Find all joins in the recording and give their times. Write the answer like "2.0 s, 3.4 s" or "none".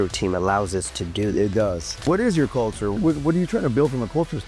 2.0 s, 3.0 s